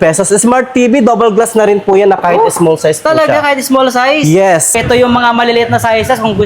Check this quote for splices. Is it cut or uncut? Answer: cut